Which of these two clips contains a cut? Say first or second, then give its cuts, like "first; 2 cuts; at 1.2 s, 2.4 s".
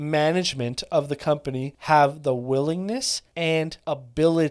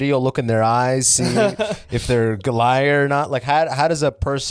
first; 2 cuts; at 1.7 s, 3.6 s